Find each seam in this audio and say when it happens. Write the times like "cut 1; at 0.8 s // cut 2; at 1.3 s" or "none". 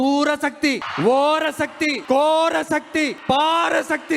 cut 1; at 0.9 s // cut 2; at 2.0 s // cut 3; at 3.2 s